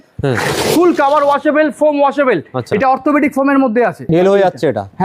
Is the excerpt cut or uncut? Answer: cut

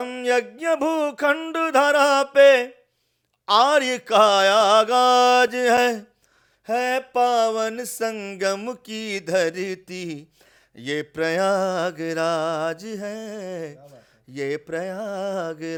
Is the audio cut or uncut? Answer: uncut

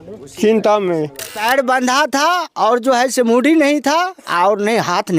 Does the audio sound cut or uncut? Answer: cut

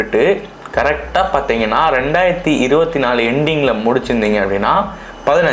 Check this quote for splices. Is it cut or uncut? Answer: uncut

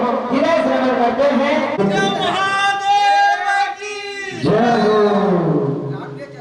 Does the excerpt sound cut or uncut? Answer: cut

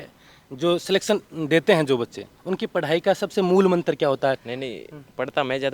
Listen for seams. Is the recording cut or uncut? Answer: cut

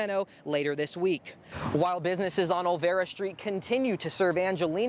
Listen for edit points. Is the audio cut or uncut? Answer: cut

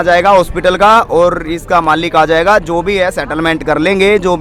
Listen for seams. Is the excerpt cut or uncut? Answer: uncut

